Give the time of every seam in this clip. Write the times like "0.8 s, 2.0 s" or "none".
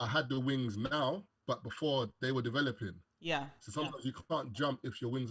1.3 s